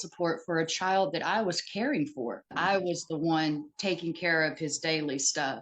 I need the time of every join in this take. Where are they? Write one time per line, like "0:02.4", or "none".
0:02.5